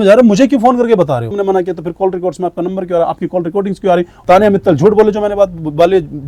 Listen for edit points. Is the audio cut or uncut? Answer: cut